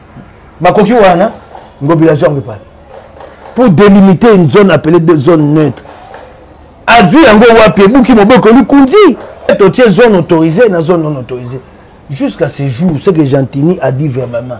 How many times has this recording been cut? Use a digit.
1